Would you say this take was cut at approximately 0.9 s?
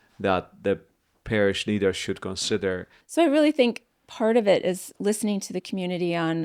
no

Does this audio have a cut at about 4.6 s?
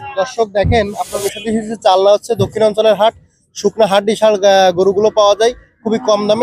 no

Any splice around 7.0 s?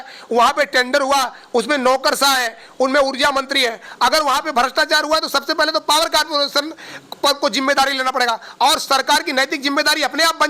no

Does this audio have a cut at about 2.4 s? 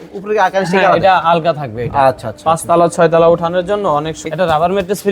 no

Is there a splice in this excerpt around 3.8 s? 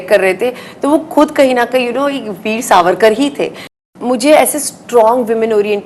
yes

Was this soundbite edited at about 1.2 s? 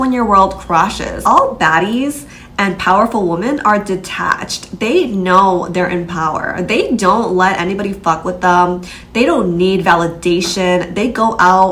yes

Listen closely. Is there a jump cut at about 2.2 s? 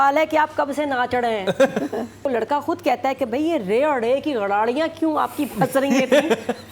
yes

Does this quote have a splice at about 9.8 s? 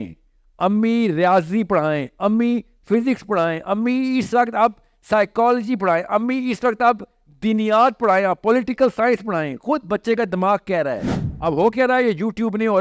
no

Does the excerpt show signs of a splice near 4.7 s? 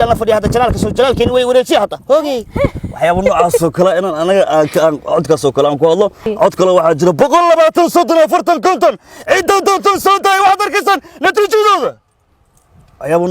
no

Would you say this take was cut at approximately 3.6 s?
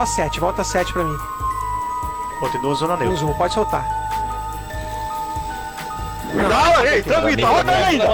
no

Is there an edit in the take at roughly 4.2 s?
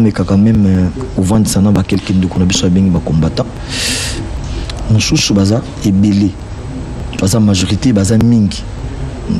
yes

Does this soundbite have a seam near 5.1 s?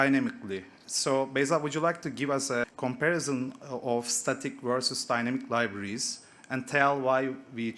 no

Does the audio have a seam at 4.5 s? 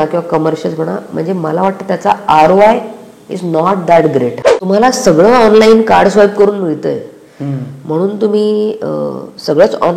yes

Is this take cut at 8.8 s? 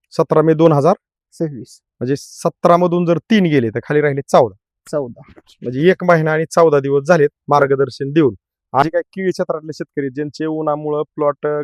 yes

